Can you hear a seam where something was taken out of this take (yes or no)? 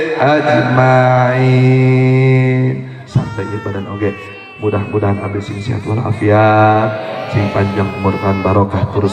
yes